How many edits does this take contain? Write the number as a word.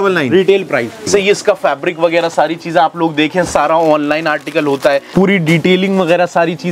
two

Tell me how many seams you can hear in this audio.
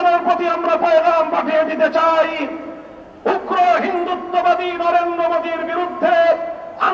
zero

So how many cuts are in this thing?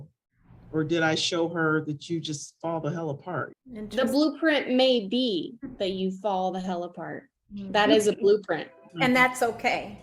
two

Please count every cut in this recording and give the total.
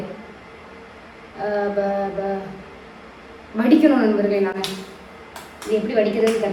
zero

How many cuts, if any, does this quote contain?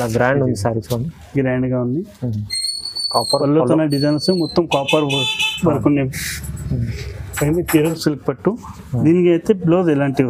one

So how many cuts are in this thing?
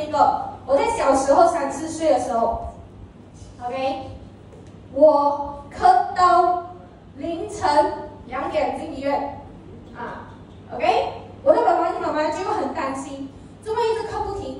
zero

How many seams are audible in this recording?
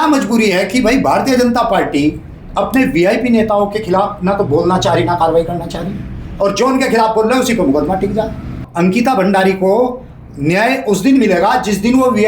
one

